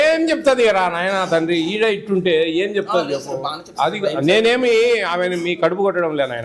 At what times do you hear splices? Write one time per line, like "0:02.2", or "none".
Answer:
none